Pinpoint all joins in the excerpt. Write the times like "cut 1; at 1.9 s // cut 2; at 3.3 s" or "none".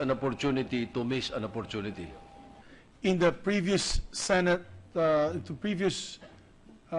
none